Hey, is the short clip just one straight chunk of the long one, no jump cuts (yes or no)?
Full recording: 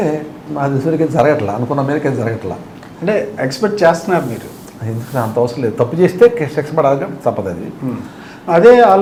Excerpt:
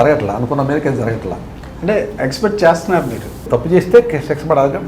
no